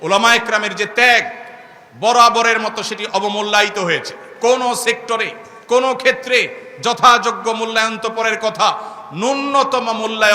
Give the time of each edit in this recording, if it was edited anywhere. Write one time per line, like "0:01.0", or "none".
none